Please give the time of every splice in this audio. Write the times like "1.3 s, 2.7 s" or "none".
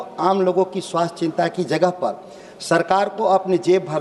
none